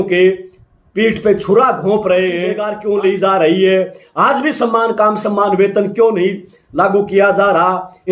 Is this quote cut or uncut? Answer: cut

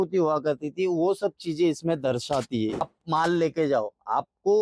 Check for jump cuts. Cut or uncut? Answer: cut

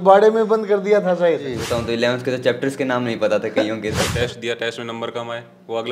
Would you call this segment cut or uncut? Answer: cut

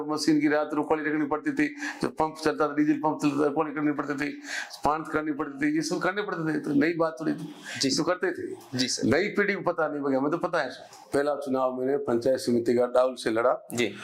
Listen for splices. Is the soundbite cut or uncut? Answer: cut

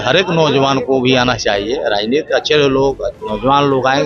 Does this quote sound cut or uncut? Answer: uncut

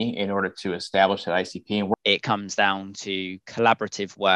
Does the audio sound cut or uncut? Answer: cut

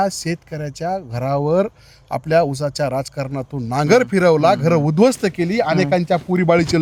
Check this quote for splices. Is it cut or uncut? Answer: uncut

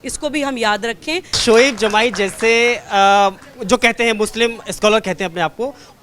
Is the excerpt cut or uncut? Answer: cut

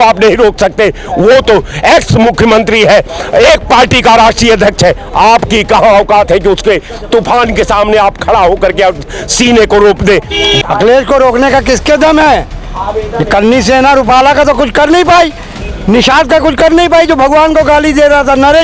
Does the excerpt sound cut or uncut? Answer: cut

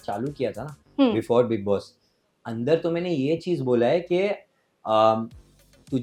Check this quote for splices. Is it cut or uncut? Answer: uncut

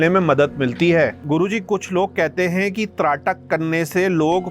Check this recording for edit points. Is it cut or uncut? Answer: cut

